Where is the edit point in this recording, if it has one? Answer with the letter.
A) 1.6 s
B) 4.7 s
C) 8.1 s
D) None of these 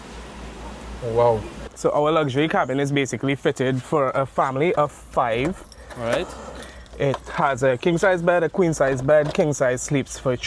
A